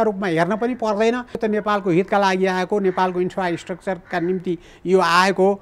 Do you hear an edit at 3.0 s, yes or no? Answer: no